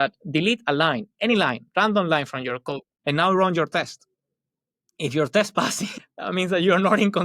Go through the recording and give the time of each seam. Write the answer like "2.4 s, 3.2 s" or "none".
2.9 s